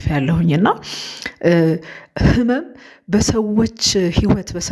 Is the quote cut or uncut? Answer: uncut